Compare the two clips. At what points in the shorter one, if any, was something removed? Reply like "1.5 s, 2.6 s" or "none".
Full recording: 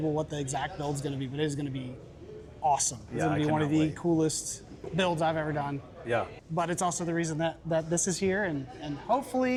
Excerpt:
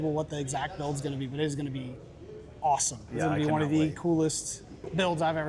none

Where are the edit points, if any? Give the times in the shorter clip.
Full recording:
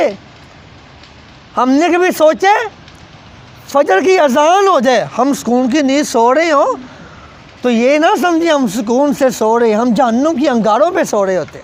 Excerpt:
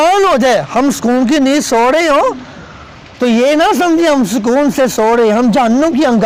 none

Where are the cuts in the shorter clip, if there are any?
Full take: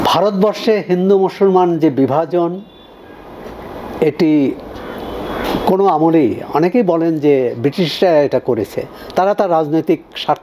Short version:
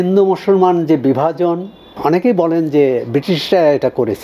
1.9 s

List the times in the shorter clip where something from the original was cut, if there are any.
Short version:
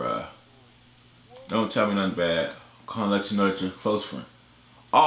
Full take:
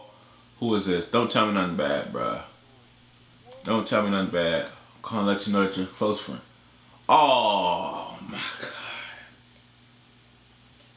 none

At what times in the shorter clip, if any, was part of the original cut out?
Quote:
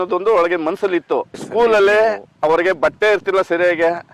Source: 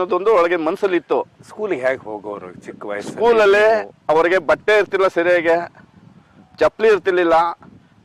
1.4 s

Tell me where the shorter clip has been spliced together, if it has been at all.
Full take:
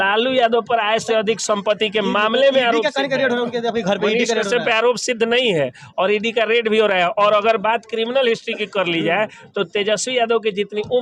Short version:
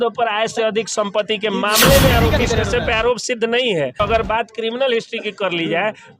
2.4 s, 4.0 s

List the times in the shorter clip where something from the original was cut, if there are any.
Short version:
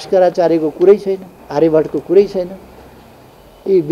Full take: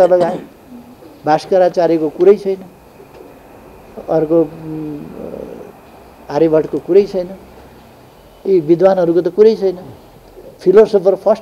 1.3 s

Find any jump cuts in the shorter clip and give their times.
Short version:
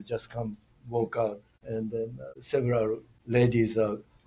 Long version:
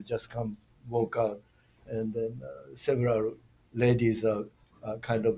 1.9 s, 3.1 s

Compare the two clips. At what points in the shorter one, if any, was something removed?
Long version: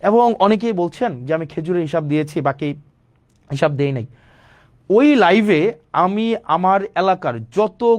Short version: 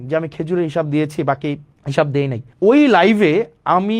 1.7 s, 2.4 s

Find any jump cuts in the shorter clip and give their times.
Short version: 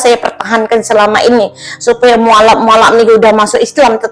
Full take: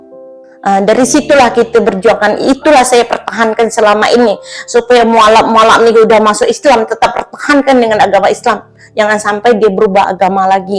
none

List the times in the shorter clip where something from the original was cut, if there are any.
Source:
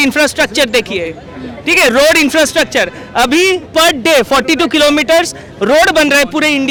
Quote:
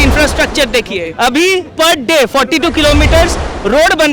1.1 s

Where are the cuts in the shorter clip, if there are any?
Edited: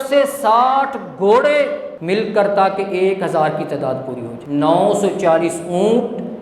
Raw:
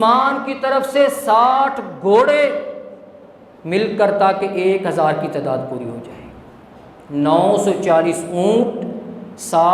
1.9 s, 4.3 s

